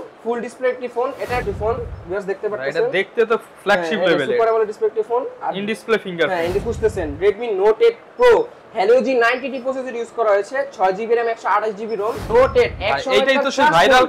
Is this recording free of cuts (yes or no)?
no